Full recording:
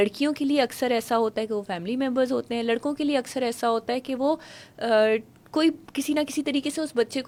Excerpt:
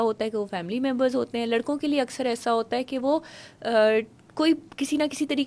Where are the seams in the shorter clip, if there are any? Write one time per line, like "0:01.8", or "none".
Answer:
none